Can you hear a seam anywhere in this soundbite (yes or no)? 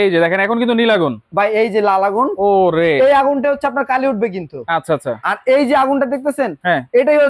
no